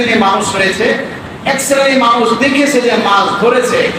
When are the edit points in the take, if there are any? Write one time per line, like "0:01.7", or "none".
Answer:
none